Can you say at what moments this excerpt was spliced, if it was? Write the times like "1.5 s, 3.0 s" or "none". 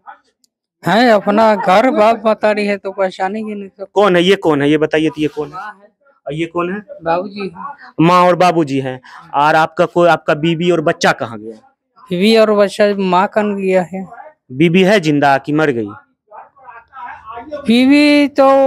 none